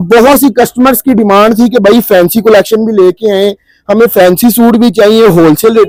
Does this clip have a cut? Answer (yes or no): no